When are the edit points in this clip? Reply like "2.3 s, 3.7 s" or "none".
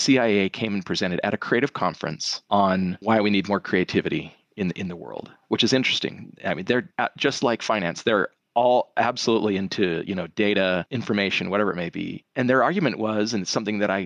10.9 s, 12.2 s